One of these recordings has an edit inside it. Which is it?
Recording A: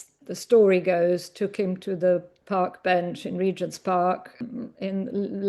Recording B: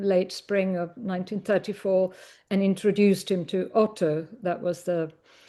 A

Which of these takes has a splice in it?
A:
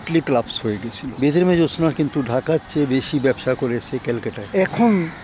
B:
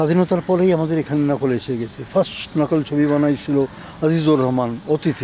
A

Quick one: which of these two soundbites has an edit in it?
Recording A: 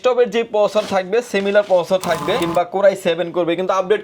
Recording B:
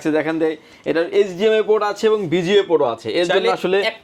A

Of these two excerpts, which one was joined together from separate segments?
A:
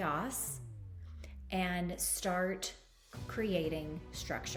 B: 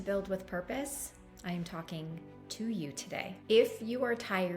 B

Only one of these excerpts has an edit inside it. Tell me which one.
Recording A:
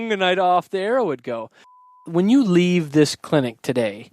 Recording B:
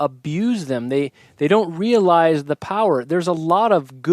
A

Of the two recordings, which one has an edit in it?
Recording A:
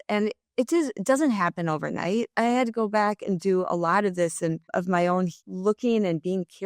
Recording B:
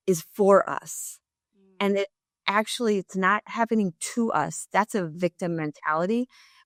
A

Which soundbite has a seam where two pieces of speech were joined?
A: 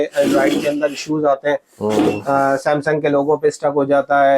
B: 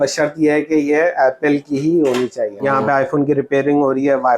B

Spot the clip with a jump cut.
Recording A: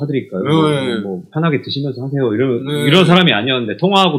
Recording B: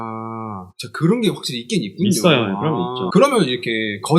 B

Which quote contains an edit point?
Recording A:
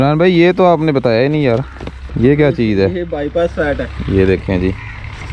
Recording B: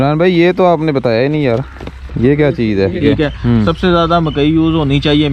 B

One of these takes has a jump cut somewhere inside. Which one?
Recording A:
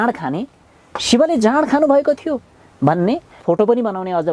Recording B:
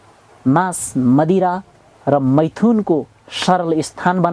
A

